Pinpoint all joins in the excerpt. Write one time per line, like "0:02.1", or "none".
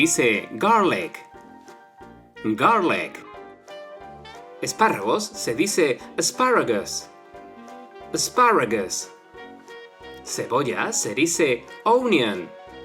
0:08.9
0:10.3

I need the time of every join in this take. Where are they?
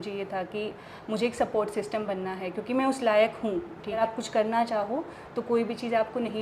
0:04.0

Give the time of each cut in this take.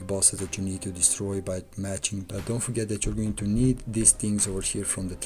0:02.3

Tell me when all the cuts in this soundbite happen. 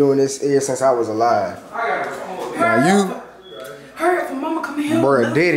none

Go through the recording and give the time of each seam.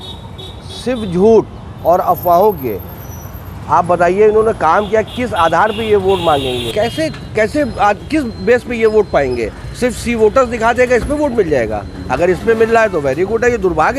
0:06.7

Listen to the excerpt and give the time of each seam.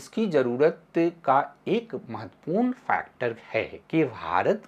0:03.8

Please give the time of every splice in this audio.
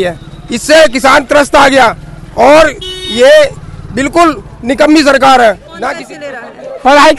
0:05.7

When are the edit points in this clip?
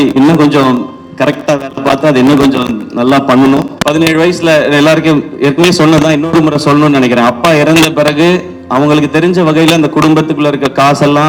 0:03.7

